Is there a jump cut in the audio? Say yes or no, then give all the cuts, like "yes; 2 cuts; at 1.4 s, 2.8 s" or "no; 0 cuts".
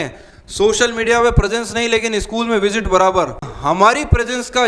yes; 1 cut; at 3.5 s